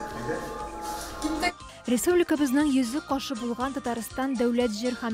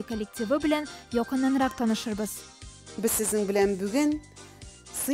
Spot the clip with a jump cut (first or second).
second